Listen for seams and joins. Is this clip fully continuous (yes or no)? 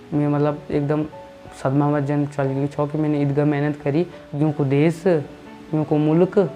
no